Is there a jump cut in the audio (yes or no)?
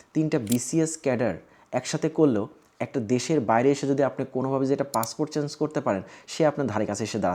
no